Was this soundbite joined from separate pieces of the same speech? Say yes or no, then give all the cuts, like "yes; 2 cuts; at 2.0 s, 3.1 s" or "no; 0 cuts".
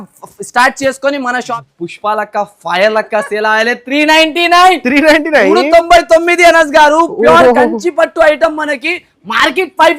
yes; 1 cut; at 1.4 s